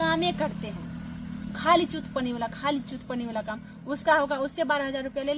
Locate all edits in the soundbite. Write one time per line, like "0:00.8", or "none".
none